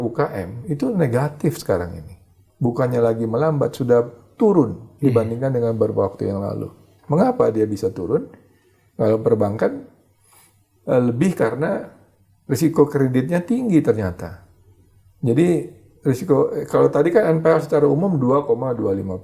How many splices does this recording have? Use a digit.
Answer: 0